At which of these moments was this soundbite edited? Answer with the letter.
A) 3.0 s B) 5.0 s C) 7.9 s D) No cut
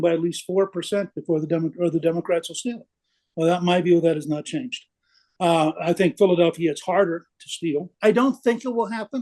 C